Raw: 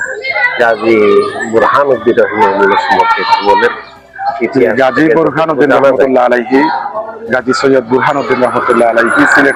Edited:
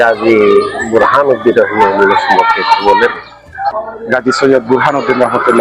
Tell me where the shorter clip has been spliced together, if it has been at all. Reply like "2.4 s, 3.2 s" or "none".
3.8 s